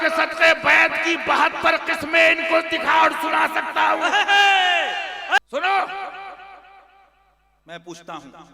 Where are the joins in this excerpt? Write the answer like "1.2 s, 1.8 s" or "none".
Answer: 5.4 s